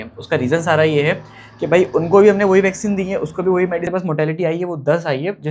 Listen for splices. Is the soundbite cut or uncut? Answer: cut